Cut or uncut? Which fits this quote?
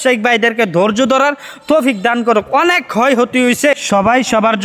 uncut